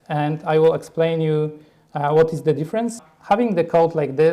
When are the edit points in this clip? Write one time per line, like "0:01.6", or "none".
0:03.1